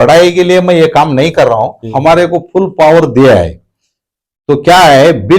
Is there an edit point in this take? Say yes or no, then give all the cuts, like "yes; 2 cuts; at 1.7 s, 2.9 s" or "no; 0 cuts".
yes; 1 cut; at 1.8 s